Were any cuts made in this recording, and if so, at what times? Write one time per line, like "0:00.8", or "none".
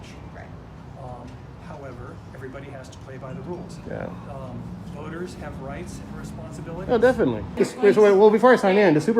0:07.5